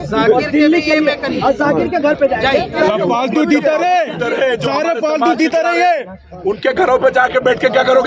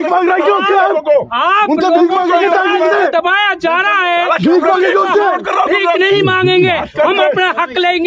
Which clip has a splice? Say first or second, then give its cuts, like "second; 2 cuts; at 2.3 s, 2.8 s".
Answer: first; 1 cut; at 2.8 s